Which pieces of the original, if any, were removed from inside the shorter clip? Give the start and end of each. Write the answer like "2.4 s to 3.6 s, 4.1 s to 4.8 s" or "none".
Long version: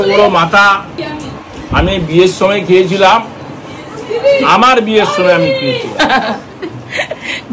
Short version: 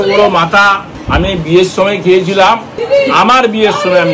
0.9 s to 1.5 s, 3.4 s to 4.1 s